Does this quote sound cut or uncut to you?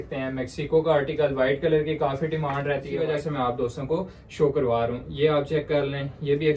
cut